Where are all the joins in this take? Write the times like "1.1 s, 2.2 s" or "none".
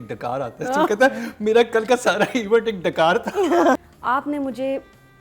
3.8 s